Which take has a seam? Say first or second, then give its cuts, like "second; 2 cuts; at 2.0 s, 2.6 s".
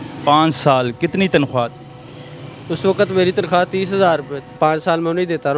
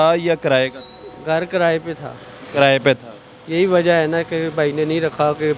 first; 1 cut; at 4.6 s